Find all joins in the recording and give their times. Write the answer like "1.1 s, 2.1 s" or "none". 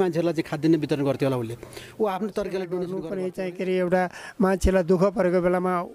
3.0 s